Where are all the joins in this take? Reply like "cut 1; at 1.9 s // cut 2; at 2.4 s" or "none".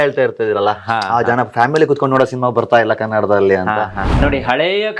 cut 1; at 4.0 s

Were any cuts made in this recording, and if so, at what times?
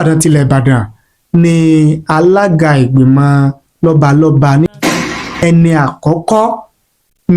cut 1; at 4.9 s

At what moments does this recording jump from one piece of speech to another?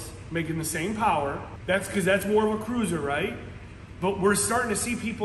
cut 1; at 1.5 s

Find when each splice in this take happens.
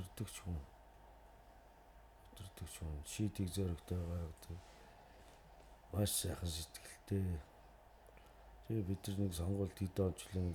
none

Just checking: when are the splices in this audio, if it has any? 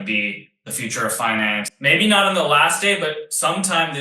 cut 1; at 1.7 s

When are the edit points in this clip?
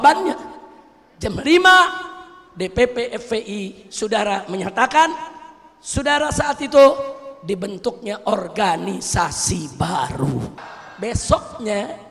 cut 1; at 10.5 s

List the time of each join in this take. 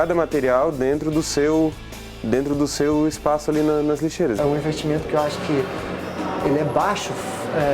cut 1; at 4.4 s

